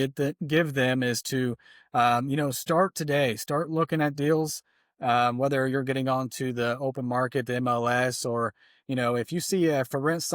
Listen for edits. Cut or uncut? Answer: uncut